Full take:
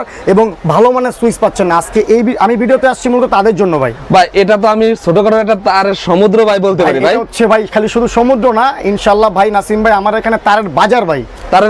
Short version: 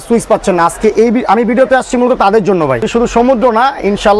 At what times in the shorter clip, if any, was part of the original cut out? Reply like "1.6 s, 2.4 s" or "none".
2.9 s